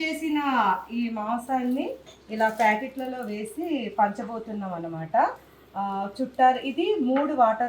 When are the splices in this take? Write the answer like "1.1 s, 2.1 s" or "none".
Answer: none